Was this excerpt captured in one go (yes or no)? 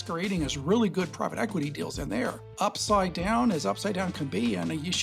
no